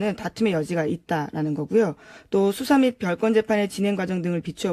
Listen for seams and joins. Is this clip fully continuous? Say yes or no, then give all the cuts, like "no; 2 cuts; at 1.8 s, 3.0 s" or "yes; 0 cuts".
no; 1 cut; at 3.8 s